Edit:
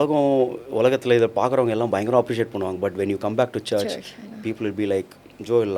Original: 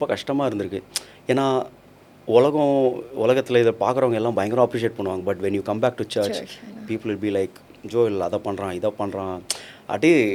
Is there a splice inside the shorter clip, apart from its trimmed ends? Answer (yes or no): no